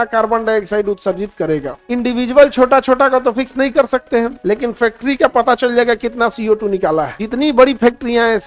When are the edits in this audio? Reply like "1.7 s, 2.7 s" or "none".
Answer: 1.7 s, 4.4 s, 7.2 s